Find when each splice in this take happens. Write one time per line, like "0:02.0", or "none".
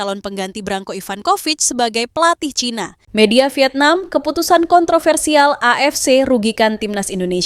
0:03.0